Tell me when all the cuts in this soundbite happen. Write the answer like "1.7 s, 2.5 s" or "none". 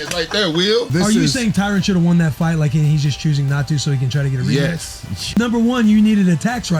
0.9 s, 5.4 s